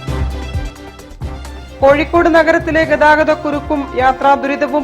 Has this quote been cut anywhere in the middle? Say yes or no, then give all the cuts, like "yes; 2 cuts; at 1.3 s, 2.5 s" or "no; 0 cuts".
no; 0 cuts